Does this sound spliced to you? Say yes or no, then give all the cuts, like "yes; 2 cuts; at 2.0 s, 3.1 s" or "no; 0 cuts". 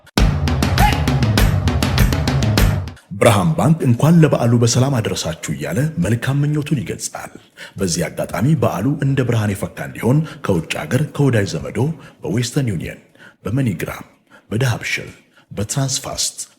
yes; 1 cut; at 2.9 s